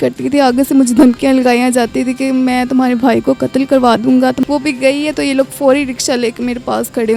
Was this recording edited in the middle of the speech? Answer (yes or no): yes